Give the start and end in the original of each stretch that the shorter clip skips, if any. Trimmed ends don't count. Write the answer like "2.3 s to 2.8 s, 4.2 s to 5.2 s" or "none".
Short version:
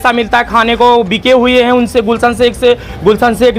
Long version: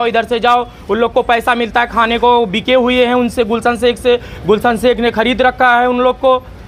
none

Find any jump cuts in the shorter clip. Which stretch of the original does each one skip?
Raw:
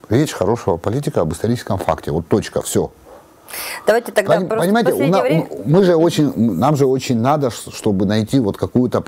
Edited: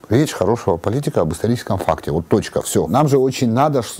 2.9 s to 6.6 s

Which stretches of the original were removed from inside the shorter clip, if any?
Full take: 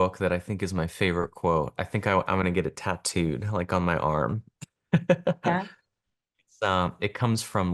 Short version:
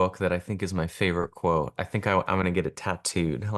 none

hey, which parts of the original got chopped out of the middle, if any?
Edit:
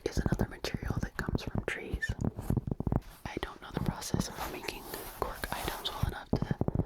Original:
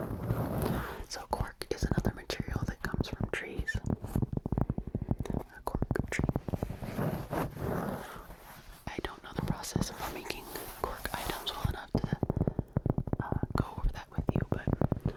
4.7 s to 8.6 s

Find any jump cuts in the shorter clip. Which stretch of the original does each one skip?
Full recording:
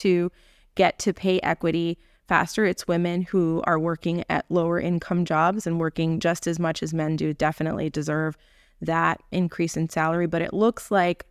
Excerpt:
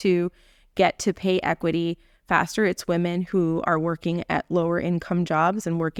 none

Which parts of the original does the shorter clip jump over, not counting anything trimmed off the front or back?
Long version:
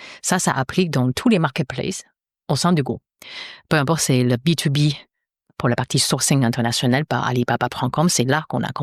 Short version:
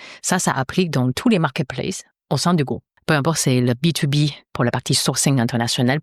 2.1 s to 2.3 s, 3.1 s to 3.5 s, 5.1 s to 5.5 s

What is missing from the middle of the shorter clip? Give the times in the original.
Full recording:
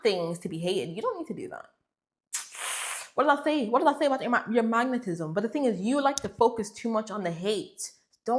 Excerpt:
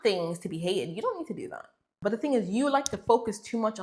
1.9 s to 5.3 s

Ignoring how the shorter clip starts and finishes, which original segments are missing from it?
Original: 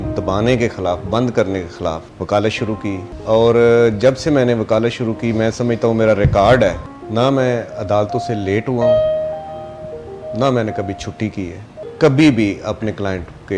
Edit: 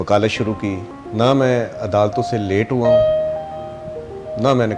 3.1 s to 6.9 s

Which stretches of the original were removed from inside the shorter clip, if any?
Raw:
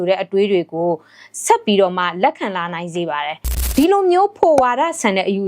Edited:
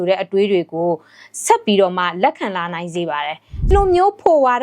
3.7 s to 3.9 s

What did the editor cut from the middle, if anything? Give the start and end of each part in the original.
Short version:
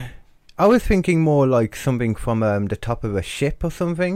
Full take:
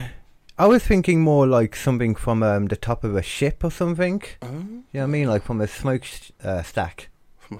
none

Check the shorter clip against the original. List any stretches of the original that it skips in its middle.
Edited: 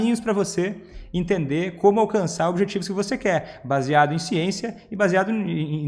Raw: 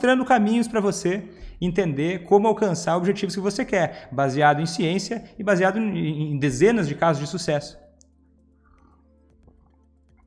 none

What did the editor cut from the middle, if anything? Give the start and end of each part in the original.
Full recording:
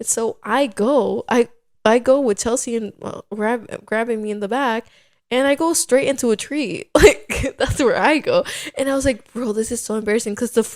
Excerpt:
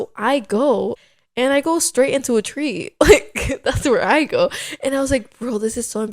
1.2 s to 4.9 s

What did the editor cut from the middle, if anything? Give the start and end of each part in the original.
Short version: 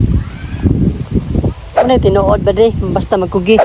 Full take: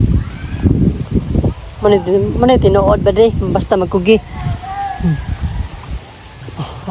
1.8 s to 2.4 s

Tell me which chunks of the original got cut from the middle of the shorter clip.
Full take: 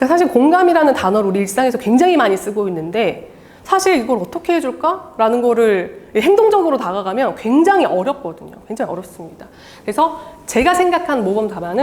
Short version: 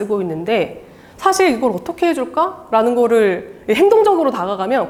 none

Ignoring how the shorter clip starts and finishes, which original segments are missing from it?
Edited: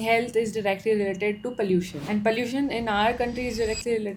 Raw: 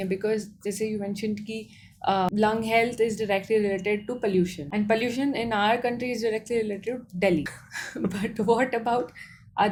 none

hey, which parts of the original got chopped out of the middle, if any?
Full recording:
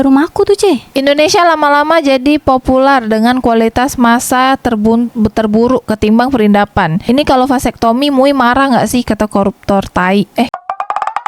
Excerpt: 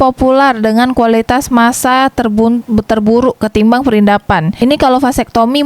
none

